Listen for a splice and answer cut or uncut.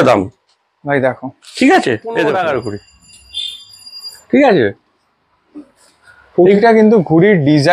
cut